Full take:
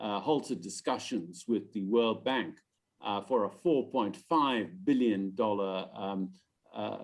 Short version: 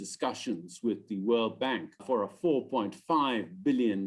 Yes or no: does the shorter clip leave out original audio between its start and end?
yes